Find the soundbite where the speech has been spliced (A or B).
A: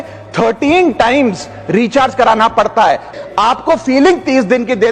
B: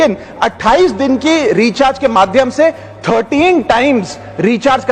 A